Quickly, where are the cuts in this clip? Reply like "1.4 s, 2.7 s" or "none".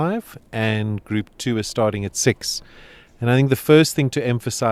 none